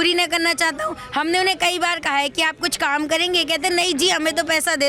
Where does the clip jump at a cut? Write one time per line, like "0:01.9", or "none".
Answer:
none